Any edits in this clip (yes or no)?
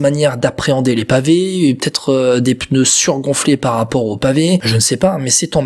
yes